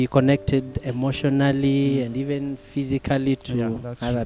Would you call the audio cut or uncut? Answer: uncut